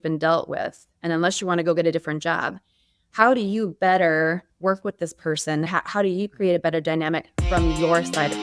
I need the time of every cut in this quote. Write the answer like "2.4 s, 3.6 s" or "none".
none